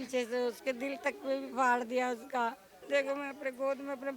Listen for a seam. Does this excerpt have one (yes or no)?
yes